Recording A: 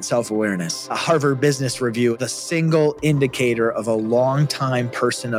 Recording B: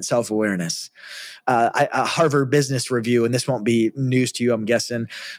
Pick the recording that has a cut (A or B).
A